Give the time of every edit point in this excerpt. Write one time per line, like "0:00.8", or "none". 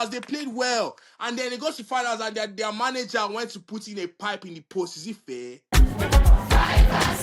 0:05.6

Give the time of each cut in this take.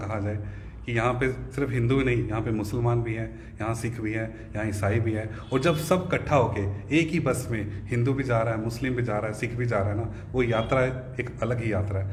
none

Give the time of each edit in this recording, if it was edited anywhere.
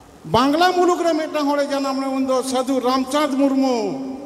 none

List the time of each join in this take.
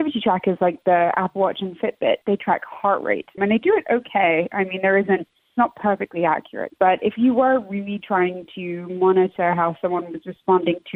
0:06.6

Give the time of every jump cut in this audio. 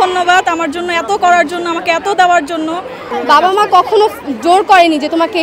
0:03.0

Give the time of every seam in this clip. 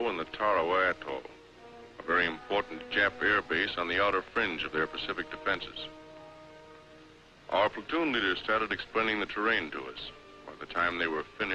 none

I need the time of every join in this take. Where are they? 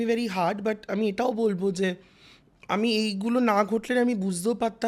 none

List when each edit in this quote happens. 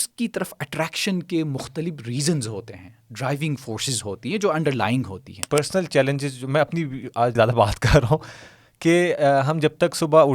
0:05.3
0:07.3

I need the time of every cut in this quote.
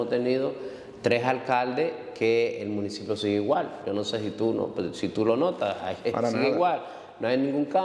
none

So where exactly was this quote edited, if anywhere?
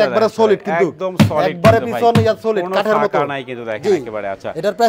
none

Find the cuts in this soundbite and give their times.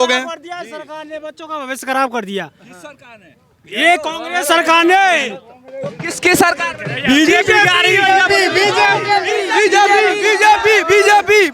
none

